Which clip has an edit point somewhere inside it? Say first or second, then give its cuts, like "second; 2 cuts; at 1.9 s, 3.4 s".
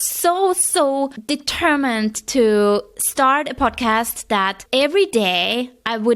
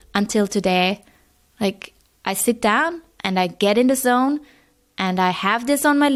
first; 2 cuts; at 1.2 s, 4.6 s